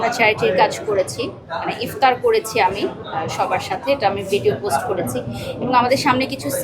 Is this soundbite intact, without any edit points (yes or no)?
yes